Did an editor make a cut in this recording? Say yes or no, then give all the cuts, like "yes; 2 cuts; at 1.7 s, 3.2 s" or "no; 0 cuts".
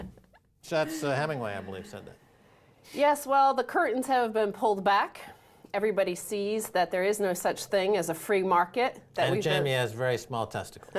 yes; 1 cut; at 4.8 s